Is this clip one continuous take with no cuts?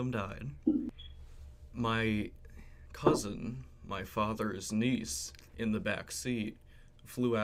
yes; 0 cuts

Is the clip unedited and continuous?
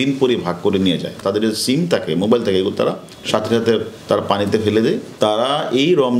no; 2 cuts; at 1.2 s, 5.1 s

